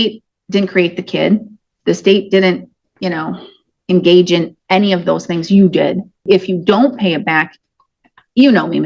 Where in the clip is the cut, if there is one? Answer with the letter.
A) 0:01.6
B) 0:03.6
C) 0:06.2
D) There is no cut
C